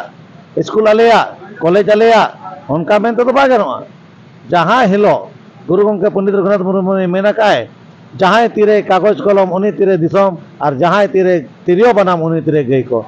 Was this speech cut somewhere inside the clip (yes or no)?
no